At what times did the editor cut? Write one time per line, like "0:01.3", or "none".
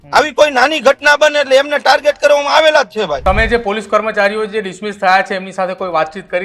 0:03.2